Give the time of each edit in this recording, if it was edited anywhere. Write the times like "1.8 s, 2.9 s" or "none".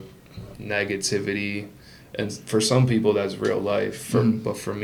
none